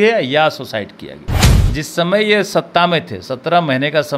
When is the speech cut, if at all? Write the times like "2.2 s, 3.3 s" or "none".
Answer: 1.5 s